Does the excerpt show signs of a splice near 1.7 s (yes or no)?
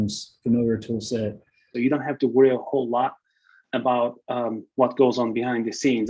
yes